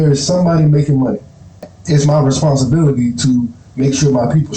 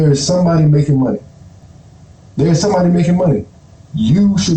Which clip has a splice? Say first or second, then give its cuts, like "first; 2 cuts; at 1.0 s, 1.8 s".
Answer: first; 1 cut; at 1.7 s